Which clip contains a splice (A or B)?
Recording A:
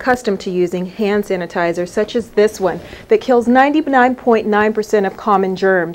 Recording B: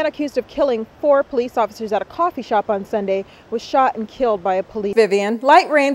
B